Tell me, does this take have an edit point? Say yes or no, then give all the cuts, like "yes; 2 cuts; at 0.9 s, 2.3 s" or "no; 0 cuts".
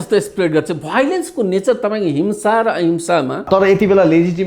yes; 1 cut; at 3.5 s